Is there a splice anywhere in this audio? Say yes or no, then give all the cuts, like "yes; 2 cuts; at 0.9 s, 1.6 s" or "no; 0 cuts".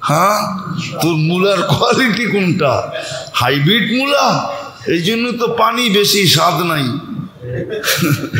no; 0 cuts